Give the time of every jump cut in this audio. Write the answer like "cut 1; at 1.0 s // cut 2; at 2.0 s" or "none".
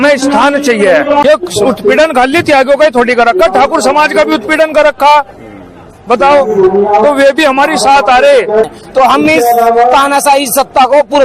cut 1; at 1.2 s // cut 2; at 8.7 s

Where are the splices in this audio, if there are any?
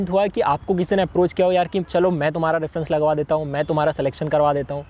none

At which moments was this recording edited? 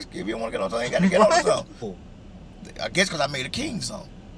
cut 1; at 2.0 s

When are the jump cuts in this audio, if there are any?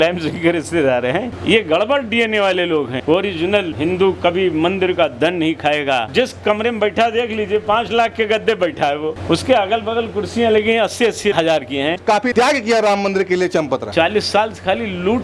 cut 1; at 1.4 s // cut 2; at 6.1 s // cut 3; at 12.0 s // cut 4; at 13.9 s

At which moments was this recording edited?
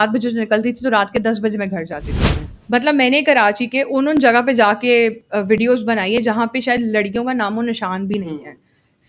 cut 1; at 2.2 s

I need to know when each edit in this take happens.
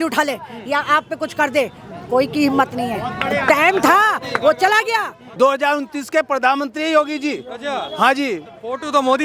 cut 1; at 5.2 s

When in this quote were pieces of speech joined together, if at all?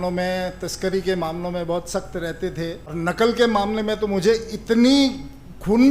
cut 1; at 2.8 s

